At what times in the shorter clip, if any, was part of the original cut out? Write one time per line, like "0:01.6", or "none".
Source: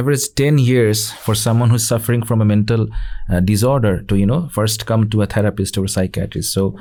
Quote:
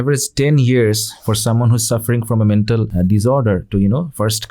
0:02.9